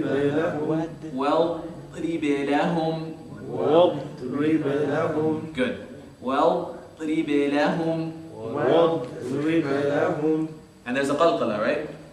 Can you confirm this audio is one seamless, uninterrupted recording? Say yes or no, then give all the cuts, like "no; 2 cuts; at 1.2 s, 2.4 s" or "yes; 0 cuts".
yes; 0 cuts